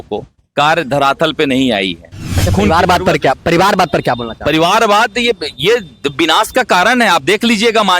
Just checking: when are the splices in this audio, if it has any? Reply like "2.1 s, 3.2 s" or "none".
2.3 s

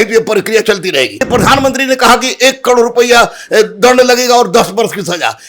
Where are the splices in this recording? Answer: 1.3 s

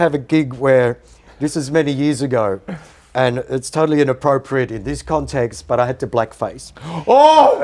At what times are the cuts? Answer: none

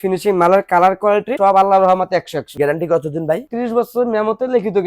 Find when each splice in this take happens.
1.3 s, 2.5 s

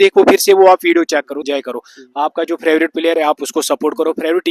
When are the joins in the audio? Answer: 1.3 s

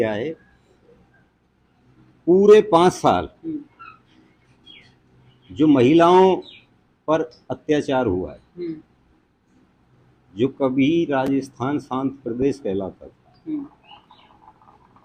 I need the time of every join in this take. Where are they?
none

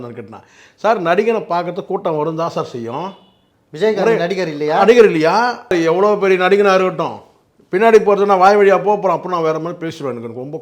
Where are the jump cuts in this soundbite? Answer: 5.7 s

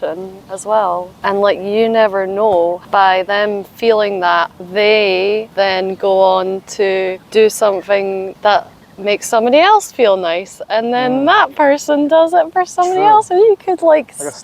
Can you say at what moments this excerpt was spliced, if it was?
1.1 s, 2.8 s, 4.6 s, 5.5 s, 7.2 s, 8.3 s

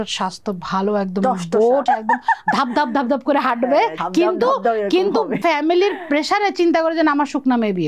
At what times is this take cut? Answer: 1.8 s, 4.0 s, 5.4 s

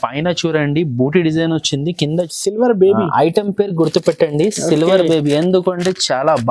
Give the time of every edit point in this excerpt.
2.3 s

